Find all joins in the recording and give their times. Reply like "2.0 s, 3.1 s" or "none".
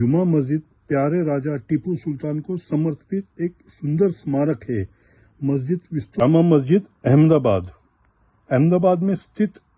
6.2 s